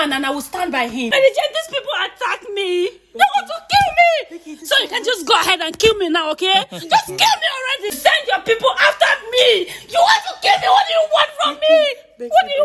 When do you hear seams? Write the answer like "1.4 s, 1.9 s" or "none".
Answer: 1.1 s, 7.9 s